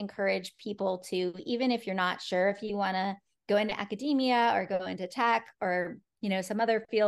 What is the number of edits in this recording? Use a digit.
0